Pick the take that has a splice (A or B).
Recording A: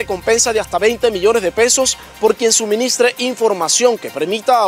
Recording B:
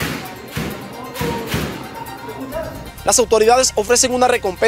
B